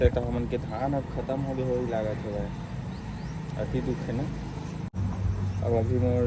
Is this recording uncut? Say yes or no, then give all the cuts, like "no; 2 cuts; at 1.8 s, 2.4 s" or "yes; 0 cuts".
no; 1 cut; at 4.9 s